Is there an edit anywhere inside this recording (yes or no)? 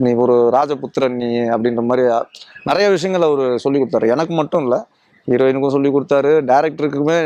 no